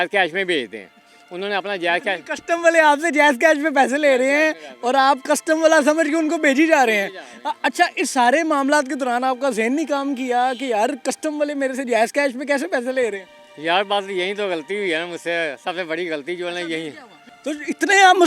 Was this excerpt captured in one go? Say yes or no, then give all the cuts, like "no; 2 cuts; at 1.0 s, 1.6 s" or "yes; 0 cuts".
yes; 0 cuts